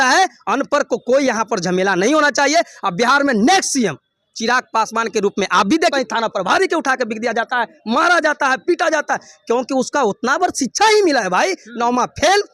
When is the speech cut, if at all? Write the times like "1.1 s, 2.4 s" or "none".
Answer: 5.9 s